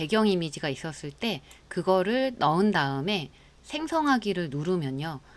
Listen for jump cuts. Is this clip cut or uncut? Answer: uncut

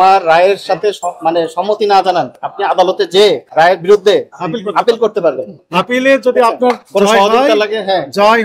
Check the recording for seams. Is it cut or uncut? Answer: cut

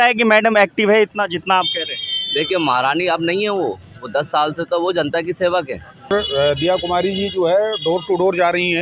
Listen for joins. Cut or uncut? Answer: cut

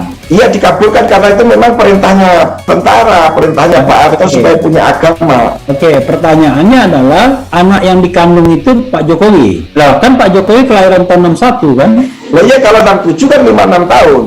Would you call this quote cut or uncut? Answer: cut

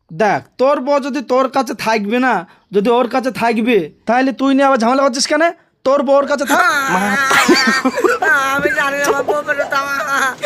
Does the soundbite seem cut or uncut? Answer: uncut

